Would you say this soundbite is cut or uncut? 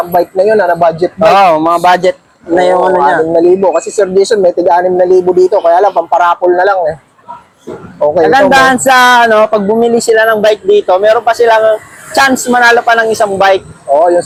uncut